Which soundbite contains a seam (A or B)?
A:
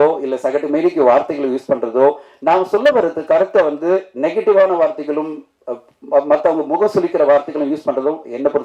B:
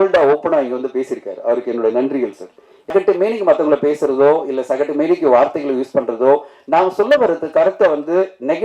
B